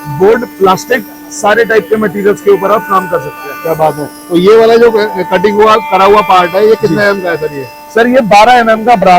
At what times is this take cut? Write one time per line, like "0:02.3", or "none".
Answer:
none